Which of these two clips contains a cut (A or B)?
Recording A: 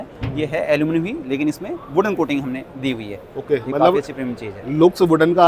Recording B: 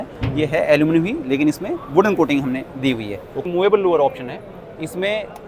B